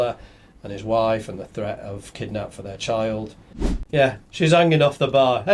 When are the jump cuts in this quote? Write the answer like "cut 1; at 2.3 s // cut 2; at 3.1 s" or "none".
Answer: cut 1; at 3.8 s

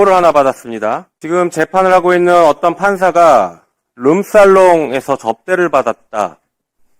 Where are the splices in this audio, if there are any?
cut 1; at 1.1 s

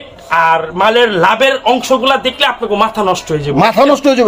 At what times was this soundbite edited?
none

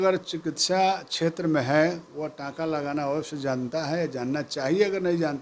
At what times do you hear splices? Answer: none

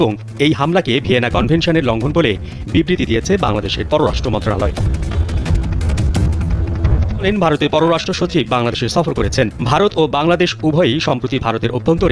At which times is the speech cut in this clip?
cut 1; at 7.2 s

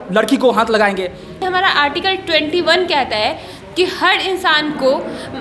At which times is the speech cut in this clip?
cut 1; at 1.4 s

